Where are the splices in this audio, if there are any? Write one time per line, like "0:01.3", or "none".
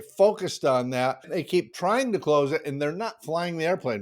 0:01.3